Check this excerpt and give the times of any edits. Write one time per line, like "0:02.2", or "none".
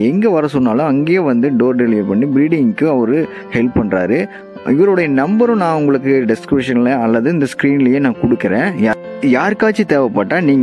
none